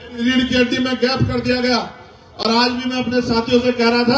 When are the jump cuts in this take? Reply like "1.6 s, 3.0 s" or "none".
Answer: none